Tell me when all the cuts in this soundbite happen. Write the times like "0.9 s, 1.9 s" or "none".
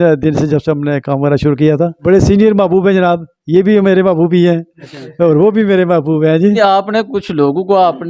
2.0 s, 6.6 s